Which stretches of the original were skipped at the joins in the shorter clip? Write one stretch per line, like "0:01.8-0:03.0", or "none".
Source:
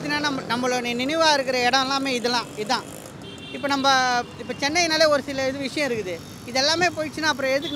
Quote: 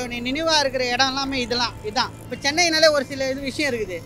0:03.0-0:04.4